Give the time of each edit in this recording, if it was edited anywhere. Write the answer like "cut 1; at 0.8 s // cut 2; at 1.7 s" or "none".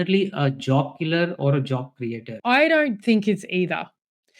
cut 1; at 2.4 s